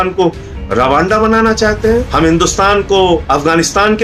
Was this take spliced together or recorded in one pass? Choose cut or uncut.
cut